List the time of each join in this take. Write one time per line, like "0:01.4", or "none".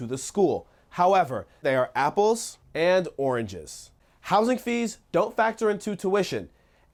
none